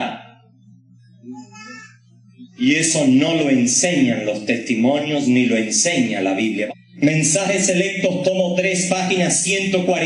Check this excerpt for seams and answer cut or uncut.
cut